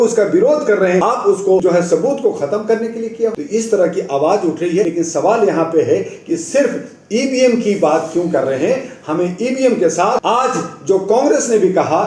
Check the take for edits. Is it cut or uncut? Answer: cut